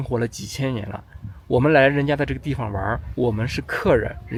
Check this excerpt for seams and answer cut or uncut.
uncut